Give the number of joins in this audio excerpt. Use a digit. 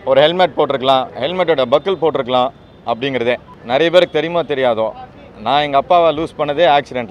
1